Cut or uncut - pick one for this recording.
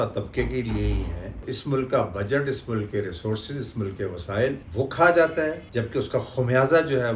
cut